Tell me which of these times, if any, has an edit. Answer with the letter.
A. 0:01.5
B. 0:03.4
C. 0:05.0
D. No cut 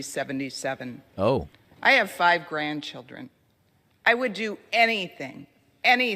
B